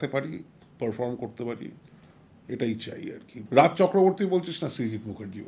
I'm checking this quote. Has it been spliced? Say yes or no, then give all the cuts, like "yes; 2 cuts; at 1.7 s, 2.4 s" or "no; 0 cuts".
yes; 1 cut; at 3.4 s